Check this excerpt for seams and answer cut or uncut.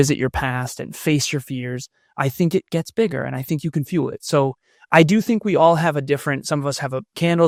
uncut